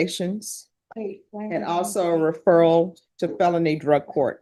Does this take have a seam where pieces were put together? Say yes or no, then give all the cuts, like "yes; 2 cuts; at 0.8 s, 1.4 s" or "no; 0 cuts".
no; 0 cuts